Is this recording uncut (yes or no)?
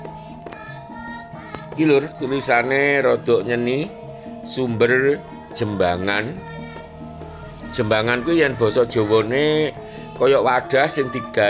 yes